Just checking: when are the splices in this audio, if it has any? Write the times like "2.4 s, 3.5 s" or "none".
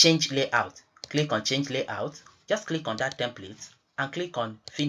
2.3 s